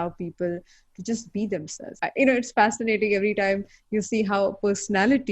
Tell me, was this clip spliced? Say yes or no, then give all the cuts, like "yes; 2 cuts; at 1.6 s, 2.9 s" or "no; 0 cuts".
yes; 1 cut; at 1.9 s